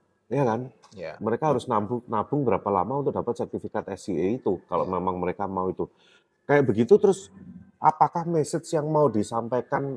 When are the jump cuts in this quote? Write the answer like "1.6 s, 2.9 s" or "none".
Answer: none